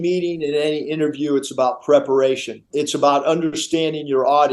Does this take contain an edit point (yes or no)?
yes